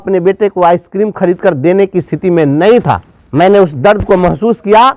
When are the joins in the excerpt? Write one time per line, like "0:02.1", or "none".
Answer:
0:03.1

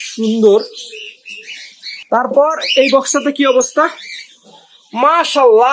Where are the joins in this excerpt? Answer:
0:01.9

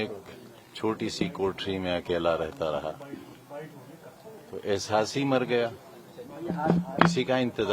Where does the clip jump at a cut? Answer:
none

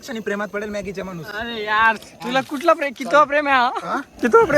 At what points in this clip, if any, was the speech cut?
0:01.3
0:02.1

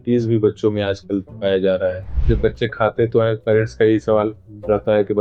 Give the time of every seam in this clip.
0:02.2

